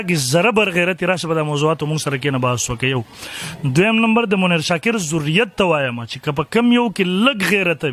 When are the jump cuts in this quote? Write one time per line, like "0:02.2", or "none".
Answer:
none